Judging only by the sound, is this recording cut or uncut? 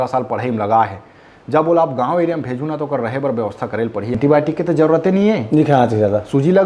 cut